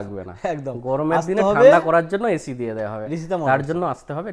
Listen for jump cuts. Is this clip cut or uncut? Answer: uncut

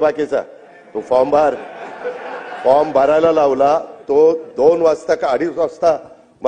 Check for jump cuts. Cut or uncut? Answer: uncut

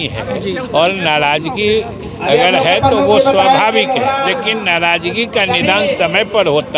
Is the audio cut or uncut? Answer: uncut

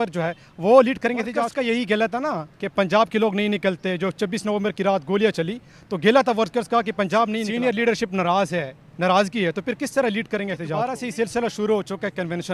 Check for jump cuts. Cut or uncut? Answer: cut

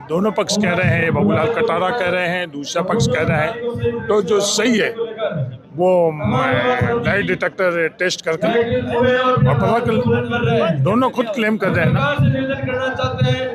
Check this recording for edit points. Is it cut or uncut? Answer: uncut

